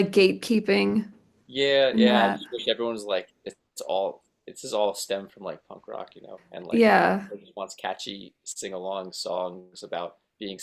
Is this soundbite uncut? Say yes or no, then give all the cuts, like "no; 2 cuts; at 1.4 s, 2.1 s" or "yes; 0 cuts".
yes; 0 cuts